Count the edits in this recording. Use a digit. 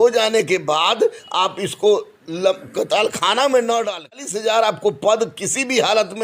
1